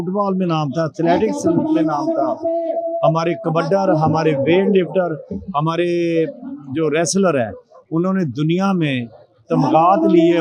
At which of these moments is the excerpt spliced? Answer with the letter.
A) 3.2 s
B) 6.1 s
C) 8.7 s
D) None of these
D